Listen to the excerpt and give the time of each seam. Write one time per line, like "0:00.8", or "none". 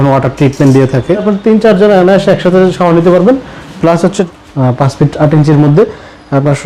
0:01.2
0:04.2